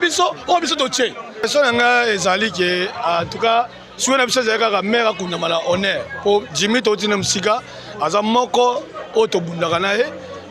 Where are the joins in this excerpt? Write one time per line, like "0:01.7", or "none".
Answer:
0:01.5